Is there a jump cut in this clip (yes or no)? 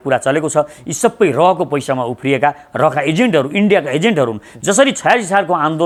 no